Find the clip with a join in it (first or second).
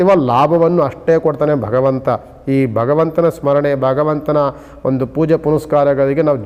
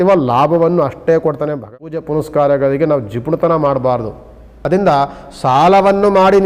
second